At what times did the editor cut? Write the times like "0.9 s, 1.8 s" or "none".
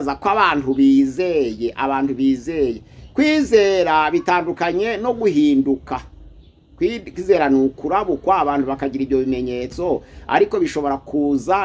none